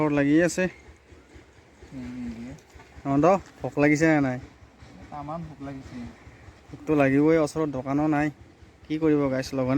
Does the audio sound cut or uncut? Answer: uncut